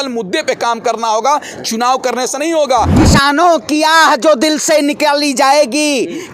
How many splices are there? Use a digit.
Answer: 1